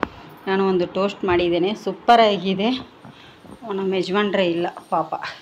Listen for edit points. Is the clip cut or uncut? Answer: uncut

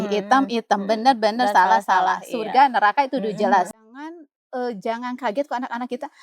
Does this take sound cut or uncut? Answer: cut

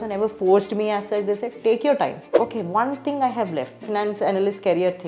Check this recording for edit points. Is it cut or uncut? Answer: cut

